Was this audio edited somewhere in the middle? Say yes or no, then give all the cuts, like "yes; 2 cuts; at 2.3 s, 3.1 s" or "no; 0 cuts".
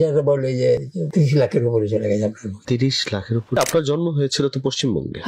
yes; 3 cuts; at 1.0 s, 2.5 s, 3.6 s